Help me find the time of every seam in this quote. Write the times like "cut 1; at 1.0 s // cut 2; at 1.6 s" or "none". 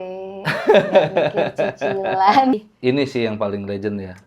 cut 1; at 2.6 s